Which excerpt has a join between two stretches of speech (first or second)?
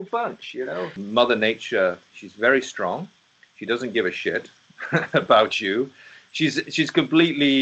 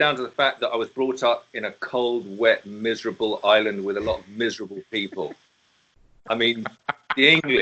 first